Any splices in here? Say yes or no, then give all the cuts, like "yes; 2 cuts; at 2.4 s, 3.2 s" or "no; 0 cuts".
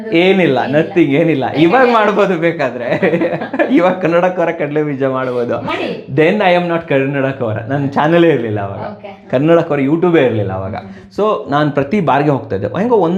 no; 0 cuts